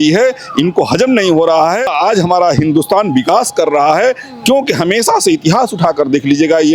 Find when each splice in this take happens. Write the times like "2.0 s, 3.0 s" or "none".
1.9 s